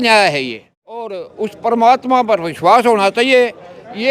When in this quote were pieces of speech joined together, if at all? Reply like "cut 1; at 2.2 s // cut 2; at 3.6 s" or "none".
cut 1; at 1.2 s